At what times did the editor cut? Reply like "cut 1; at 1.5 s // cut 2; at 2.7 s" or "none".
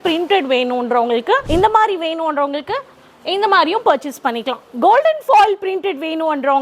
cut 1; at 1.4 s